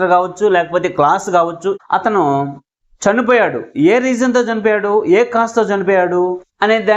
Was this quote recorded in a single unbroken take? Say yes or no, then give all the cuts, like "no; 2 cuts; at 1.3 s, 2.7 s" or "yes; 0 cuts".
no; 1 cut; at 1.8 s